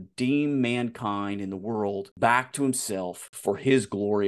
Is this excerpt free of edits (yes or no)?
no